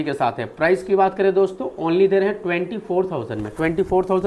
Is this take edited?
no; 0 cuts

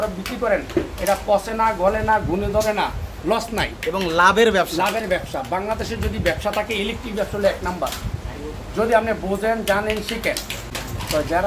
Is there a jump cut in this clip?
no; 0 cuts

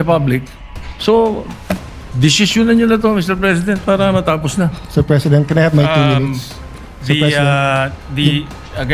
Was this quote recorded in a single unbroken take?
yes; 0 cuts

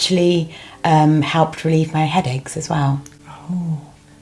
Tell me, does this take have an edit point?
no; 0 cuts

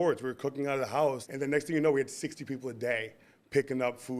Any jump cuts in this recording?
yes; 1 cut; at 1.3 s

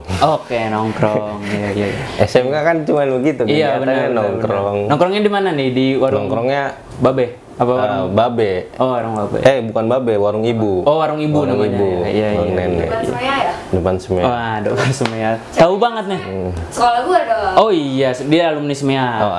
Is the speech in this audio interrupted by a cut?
no; 0 cuts

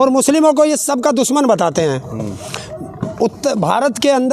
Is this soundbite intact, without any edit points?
yes; 0 cuts

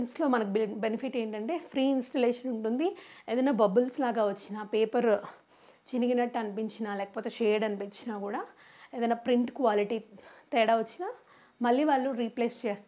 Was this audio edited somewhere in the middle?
no; 0 cuts

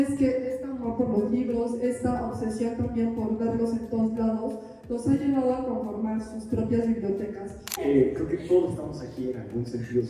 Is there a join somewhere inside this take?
yes; 1 cut; at 7.7 s

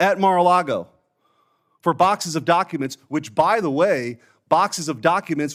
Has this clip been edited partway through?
no; 0 cuts

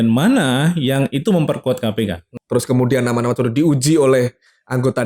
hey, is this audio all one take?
no; 1 cut; at 2.3 s

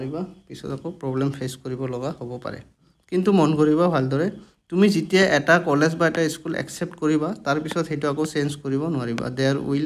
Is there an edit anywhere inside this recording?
yes; 1 cut; at 2.9 s

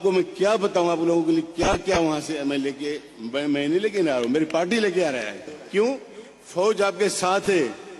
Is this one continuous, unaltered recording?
no; 1 cut; at 5.5 s

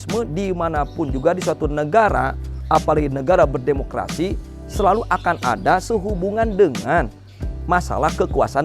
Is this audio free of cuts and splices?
yes; 0 cuts

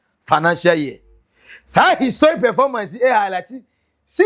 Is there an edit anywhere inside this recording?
no; 0 cuts

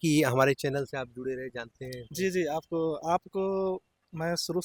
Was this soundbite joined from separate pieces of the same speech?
no; 0 cuts

